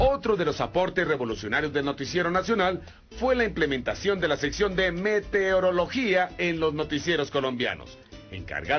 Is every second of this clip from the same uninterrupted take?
yes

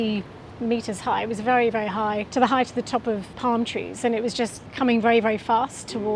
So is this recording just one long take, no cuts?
no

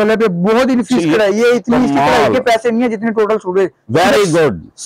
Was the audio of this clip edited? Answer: no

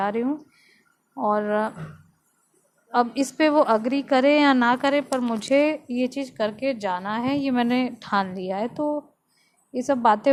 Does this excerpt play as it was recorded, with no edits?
yes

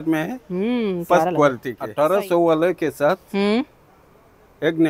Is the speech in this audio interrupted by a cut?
yes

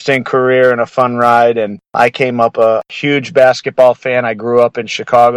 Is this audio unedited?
yes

